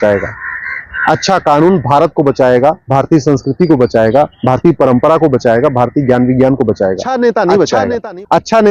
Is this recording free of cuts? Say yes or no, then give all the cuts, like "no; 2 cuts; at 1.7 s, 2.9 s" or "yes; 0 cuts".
no; 1 cut; at 7.0 s